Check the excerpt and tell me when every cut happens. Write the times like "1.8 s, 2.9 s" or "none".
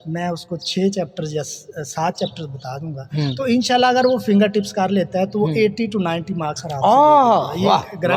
none